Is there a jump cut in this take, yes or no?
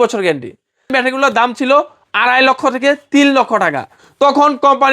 yes